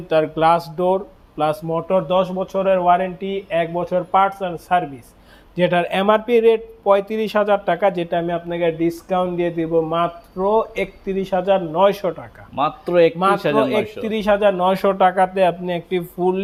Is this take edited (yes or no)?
no